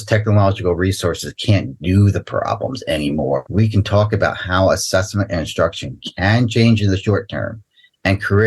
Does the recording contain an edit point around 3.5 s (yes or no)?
yes